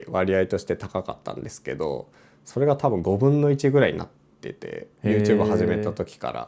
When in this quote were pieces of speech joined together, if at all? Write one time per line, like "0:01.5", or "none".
none